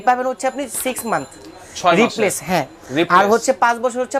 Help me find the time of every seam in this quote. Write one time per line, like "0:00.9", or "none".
none